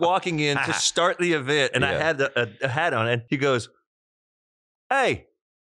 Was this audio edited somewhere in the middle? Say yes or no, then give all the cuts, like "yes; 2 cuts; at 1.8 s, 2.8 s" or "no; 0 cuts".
yes; 1 cut; at 3.2 s